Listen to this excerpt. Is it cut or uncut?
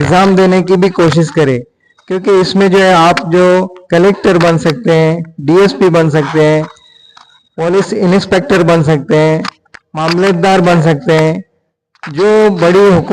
uncut